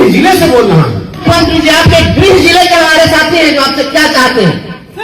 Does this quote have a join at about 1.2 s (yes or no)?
yes